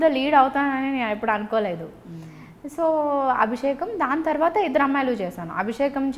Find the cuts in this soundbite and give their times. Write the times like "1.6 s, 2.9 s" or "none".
none